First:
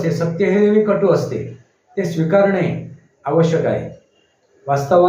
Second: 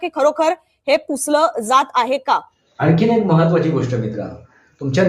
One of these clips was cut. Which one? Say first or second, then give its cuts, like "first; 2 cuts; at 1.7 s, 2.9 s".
second; 1 cut; at 2.6 s